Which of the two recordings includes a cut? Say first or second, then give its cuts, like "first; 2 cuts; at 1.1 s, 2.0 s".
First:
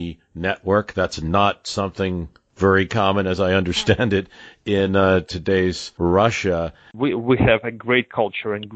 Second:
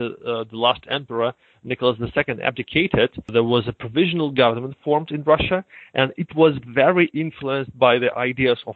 first; 2 cuts; at 5.9 s, 6.9 s